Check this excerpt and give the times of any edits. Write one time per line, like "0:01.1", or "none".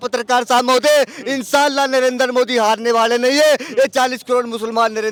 none